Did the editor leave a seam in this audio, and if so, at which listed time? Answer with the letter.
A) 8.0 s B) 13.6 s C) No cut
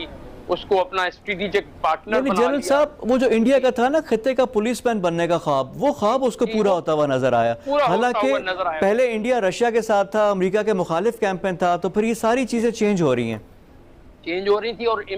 C